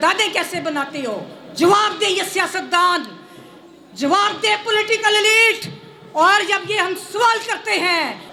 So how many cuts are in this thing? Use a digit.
0